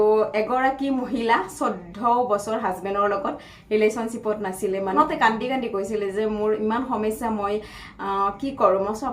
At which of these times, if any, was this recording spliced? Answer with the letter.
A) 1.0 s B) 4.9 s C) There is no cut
B